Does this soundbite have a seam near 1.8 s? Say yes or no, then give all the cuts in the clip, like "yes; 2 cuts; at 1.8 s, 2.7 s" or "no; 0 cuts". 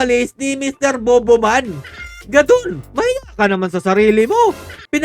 no; 0 cuts